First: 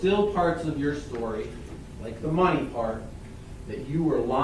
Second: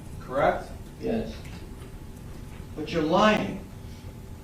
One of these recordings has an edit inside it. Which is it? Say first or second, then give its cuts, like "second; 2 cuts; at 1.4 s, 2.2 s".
second; 1 cut; at 2.6 s